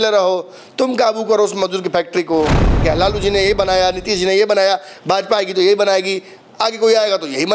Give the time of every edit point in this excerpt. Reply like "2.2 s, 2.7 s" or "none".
2.8 s